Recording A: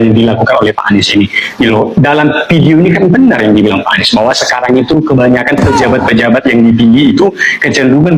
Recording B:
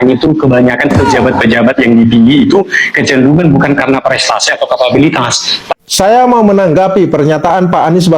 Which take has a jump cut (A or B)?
B